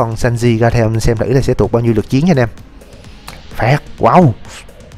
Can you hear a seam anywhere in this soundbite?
no; 0 cuts

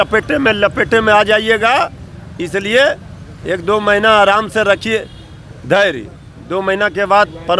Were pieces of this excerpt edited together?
no; 0 cuts

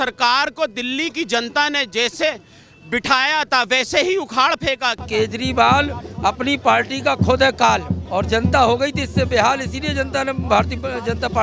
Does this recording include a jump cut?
yes; 2 cuts; at 5.0 s, 8.0 s

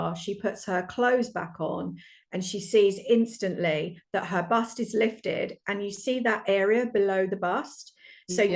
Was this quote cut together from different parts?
no; 0 cuts

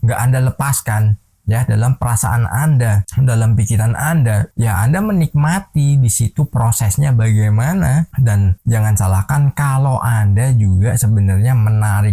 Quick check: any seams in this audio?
no; 0 cuts

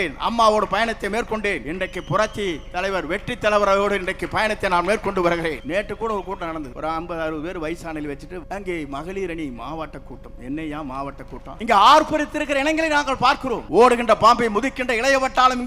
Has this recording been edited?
yes; 6 cuts; at 1.7 s, 5.6 s, 6.7 s, 8.4 s, 11.5 s, 13.6 s

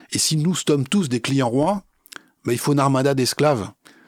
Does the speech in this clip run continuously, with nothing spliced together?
yes; 0 cuts

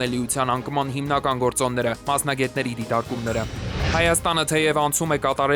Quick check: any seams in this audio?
no; 0 cuts

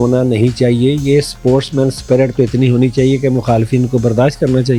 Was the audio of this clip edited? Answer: no; 0 cuts

